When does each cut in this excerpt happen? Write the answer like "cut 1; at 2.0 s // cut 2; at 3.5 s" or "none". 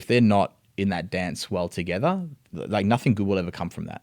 cut 1; at 2.4 s